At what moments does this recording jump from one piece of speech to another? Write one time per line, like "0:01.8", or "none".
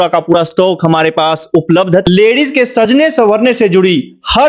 0:02.1